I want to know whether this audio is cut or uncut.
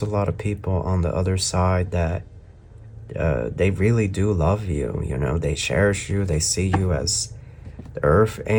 uncut